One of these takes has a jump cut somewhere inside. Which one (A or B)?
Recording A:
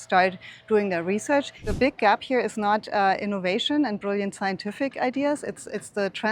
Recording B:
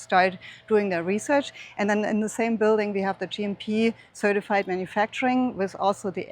A